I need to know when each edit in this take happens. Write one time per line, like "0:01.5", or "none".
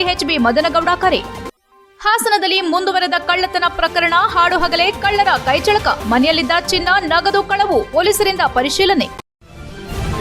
0:09.2